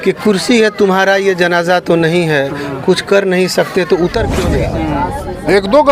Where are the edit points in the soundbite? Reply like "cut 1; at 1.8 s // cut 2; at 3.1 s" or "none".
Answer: cut 1; at 4.5 s

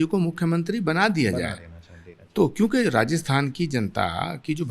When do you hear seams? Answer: none

